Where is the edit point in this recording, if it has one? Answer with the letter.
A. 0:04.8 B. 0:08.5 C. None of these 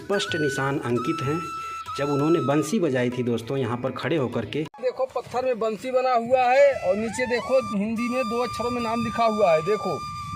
A